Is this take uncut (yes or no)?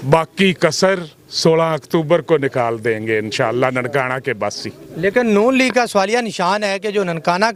yes